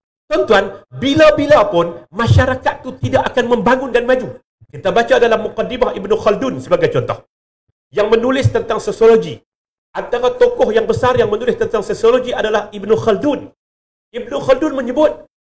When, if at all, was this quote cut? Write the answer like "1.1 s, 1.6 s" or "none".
none

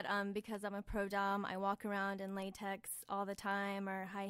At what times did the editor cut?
none

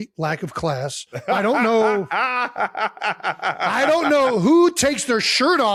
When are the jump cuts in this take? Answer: none

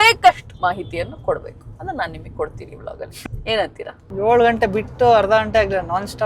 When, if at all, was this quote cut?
3.2 s, 4.0 s

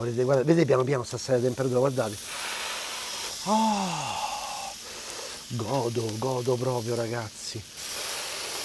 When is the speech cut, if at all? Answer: 7.7 s

